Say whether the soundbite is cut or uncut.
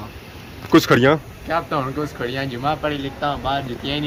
uncut